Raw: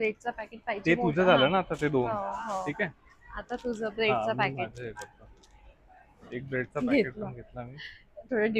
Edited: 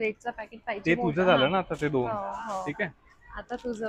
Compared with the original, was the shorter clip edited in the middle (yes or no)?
no